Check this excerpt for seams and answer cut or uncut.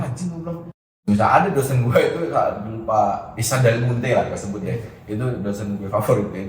cut